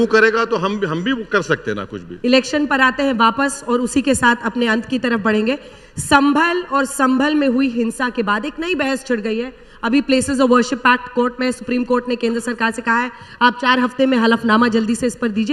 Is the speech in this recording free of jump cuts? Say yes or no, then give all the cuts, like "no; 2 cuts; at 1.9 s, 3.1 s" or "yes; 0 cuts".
yes; 0 cuts